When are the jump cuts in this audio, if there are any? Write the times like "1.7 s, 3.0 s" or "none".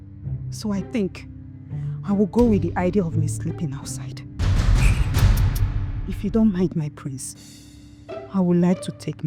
4.3 s, 5.9 s